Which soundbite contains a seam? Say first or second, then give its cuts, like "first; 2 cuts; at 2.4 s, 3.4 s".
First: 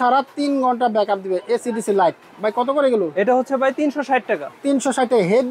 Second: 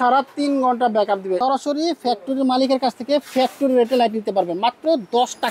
second; 1 cut; at 1.4 s